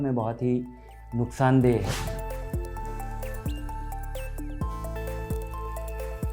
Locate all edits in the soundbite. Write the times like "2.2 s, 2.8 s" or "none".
2.4 s